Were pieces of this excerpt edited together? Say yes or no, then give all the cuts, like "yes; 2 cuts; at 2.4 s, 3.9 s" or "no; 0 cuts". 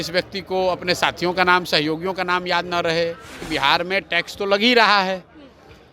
yes; 1 cut; at 3.4 s